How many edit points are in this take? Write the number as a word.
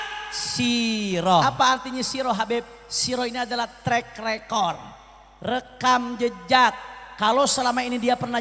one